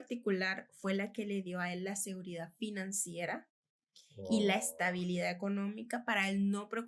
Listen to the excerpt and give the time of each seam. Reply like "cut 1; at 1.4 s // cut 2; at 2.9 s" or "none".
none